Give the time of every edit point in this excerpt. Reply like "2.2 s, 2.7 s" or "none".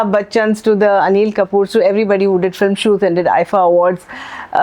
none

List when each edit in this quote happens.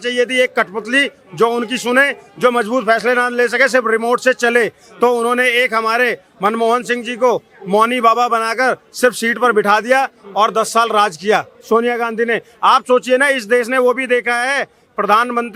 none

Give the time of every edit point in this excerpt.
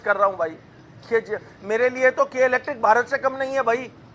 none

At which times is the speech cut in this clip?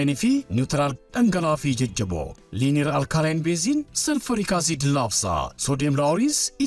none

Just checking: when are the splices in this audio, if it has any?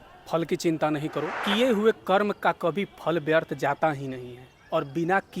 1.4 s

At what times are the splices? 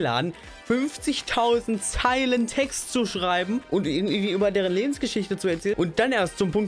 3.7 s, 5.8 s

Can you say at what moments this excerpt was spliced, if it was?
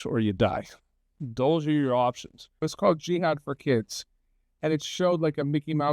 2.6 s

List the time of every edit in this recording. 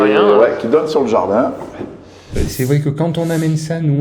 2.3 s

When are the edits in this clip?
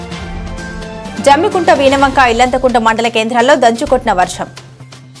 0.9 s

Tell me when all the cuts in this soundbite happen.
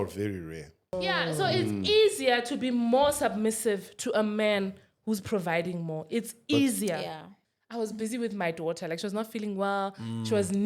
1.0 s, 7.3 s

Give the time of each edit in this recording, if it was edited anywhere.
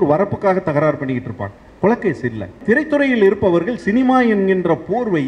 2.6 s

